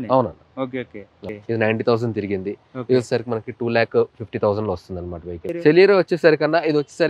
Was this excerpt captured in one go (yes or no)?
no